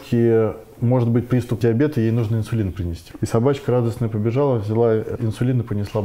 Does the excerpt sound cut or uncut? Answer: cut